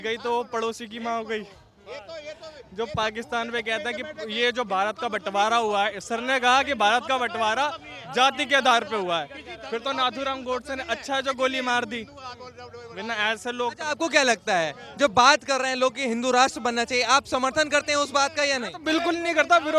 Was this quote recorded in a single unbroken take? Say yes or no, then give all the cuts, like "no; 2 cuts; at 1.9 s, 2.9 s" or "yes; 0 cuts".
yes; 0 cuts